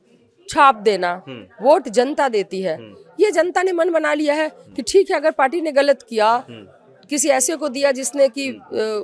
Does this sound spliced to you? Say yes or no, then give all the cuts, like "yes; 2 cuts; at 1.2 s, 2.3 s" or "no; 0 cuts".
no; 0 cuts